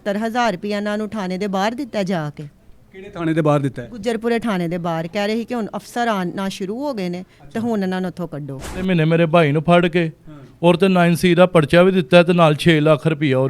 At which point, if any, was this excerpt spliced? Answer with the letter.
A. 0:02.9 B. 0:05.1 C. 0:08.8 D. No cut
C